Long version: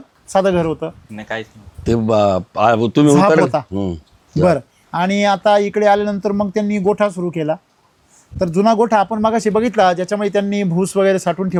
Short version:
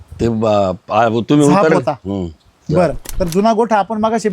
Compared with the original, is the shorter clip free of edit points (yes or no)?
no